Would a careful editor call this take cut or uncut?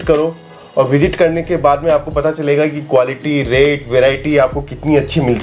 uncut